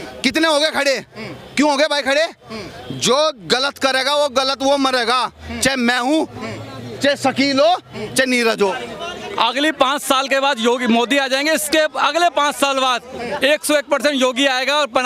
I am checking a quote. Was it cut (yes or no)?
yes